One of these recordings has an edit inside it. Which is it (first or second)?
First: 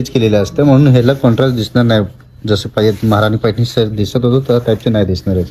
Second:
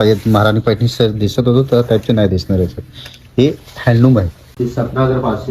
second